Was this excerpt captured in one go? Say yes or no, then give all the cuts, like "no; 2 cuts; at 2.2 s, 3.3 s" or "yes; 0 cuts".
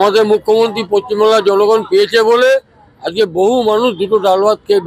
yes; 0 cuts